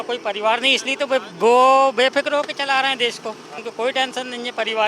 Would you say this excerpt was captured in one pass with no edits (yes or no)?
no